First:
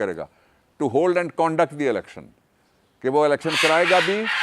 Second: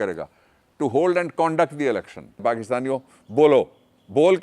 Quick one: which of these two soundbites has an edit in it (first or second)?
second